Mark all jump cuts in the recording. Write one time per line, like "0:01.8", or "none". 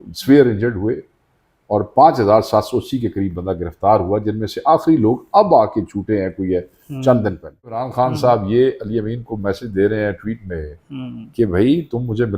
0:07.9